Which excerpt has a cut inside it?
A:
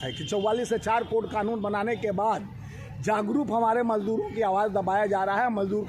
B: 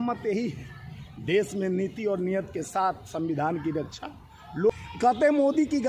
B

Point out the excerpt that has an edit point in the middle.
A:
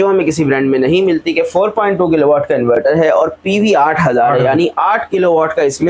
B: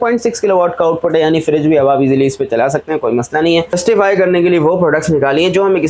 B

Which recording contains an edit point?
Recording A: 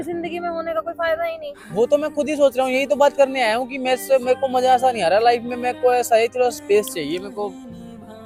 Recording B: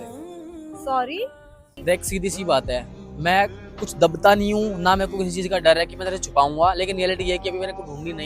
B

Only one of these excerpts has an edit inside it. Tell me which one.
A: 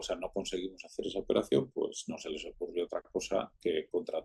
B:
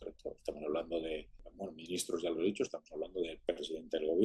B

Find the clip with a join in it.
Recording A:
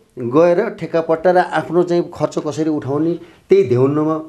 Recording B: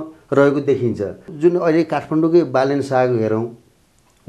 B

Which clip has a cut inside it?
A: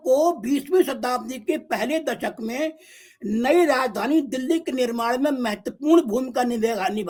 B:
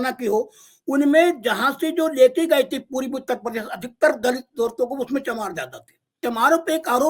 B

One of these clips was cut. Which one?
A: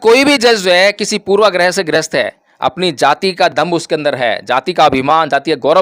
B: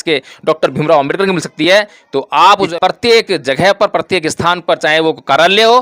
B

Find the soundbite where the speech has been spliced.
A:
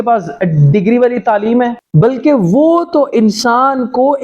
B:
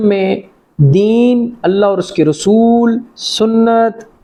A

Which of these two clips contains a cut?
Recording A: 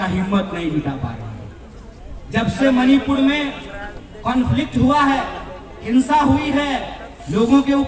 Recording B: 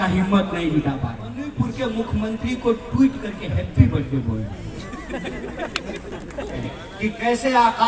B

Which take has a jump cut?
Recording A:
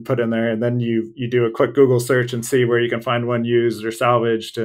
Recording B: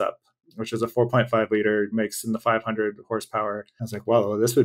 B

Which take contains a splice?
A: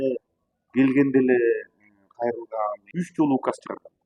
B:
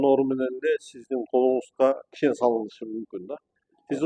A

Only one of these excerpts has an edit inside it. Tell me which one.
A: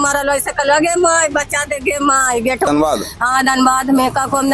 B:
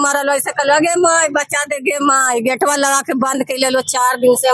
A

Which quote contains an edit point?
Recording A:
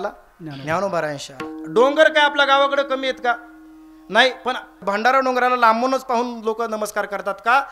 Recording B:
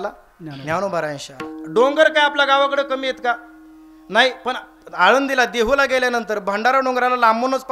A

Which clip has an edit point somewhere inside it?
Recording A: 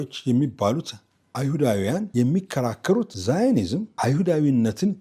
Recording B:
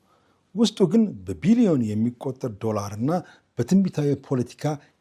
A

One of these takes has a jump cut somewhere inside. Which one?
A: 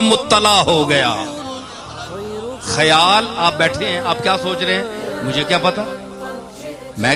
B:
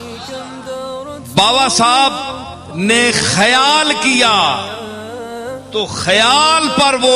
B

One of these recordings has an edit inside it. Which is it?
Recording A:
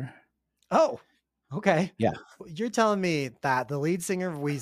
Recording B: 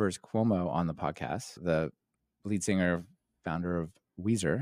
A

